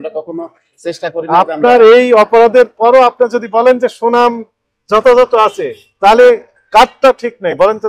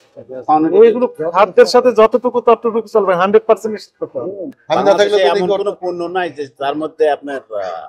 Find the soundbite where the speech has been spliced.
second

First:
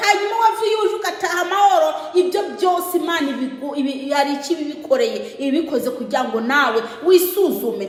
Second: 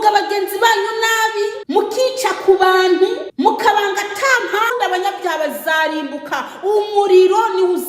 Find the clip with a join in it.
second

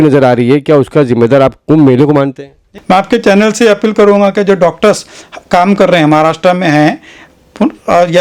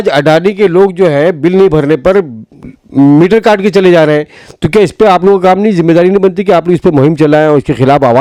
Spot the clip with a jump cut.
first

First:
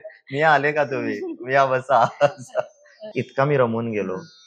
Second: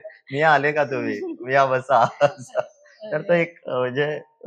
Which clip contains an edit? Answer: first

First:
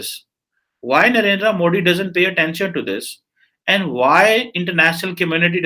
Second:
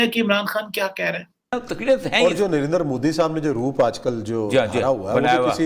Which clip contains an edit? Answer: second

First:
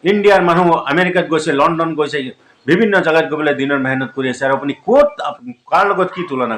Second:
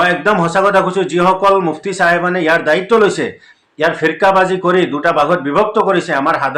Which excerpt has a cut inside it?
first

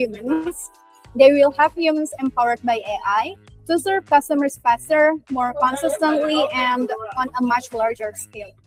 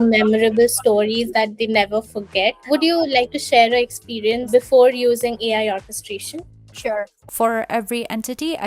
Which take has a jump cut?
second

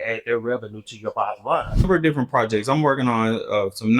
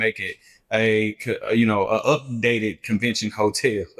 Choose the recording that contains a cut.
first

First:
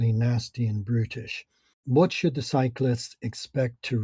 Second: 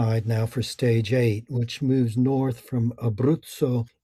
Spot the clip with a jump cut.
first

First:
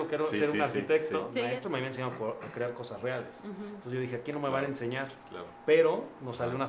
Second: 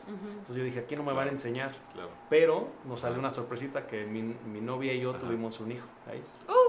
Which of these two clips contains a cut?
first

